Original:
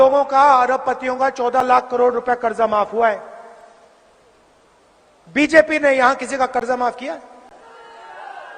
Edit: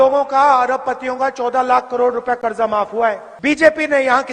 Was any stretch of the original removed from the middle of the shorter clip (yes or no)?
yes